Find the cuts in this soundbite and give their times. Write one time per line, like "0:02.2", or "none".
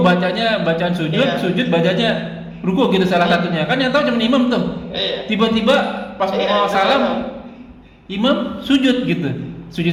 none